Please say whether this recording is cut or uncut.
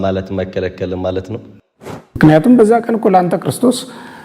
cut